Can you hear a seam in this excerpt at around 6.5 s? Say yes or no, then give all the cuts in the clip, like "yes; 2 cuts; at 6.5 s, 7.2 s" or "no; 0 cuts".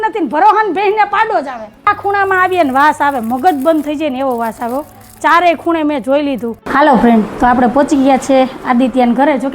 yes; 2 cuts; at 1.9 s, 6.5 s